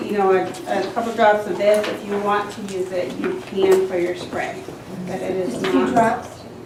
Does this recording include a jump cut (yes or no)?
no